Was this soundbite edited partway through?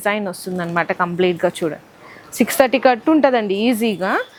no; 0 cuts

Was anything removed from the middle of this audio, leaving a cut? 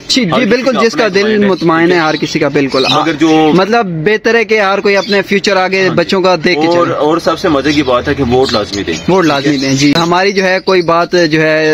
yes; 1 cut; at 9.9 s

